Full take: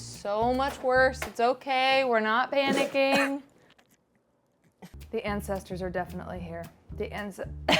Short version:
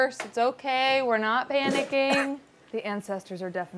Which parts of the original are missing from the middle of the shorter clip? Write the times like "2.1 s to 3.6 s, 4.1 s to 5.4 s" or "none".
3.6 s to 4.9 s